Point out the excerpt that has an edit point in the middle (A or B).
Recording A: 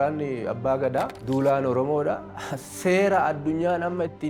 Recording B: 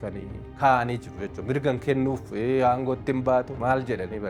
A